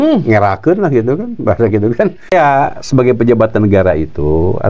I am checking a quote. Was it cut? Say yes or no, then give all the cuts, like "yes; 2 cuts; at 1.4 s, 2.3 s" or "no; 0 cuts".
yes; 1 cut; at 2.3 s